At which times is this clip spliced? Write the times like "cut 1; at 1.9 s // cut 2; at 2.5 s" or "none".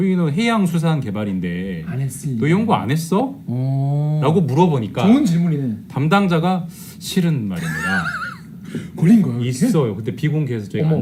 none